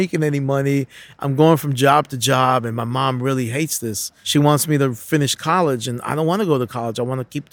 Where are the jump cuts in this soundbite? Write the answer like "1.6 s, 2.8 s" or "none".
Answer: 4.1 s